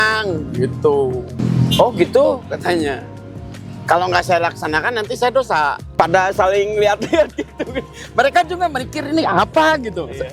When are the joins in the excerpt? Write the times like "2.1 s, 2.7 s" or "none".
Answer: 1.4 s, 5.9 s